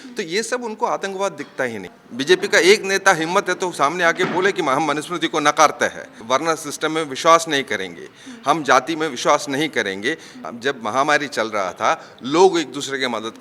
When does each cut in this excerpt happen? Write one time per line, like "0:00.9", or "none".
0:01.8
0:06.1
0:10.3